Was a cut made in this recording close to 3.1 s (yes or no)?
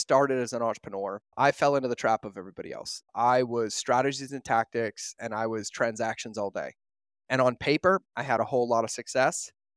yes